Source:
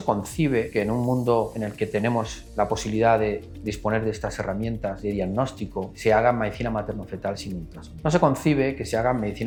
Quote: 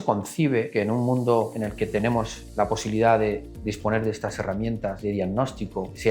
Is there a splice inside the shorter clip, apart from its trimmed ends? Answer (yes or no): no